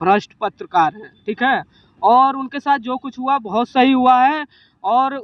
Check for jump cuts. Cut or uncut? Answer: uncut